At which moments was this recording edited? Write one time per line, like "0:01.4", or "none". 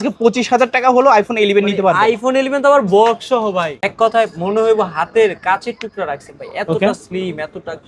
0:03.8

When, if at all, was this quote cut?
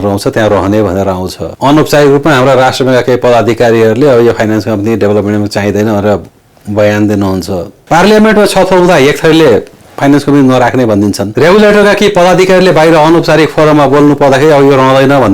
0:07.8

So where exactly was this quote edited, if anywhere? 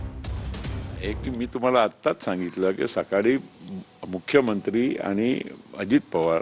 0:01.0

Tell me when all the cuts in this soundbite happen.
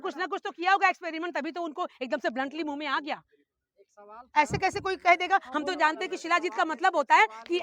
none

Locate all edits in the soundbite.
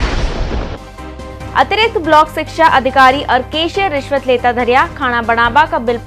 0:01.2

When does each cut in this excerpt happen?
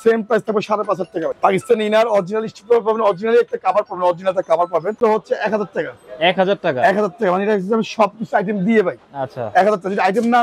0:01.3
0:04.9

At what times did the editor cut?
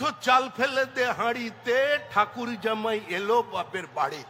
none

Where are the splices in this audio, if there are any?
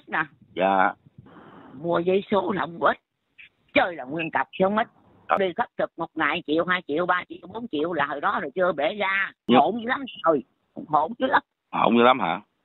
0:05.4
0:09.3

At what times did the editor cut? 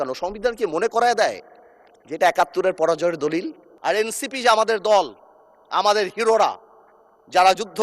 0:03.6

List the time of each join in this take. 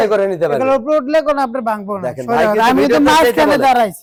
none

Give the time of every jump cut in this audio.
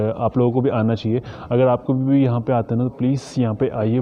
none

